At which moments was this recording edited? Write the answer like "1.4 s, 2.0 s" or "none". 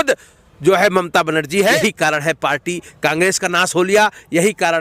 1.8 s